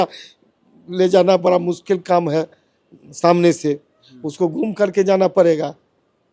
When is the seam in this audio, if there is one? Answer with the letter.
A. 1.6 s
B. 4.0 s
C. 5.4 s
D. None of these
D